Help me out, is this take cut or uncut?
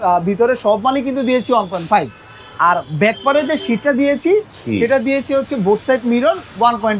uncut